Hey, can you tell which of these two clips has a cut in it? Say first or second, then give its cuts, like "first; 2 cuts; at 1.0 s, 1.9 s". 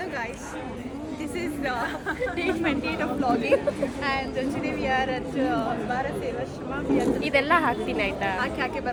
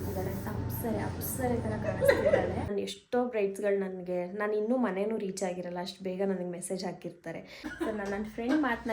second; 2 cuts; at 2.7 s, 7.6 s